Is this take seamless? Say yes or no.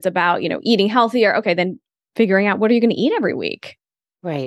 no